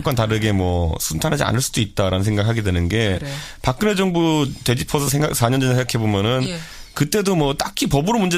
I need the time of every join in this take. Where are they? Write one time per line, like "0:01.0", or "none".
0:04.0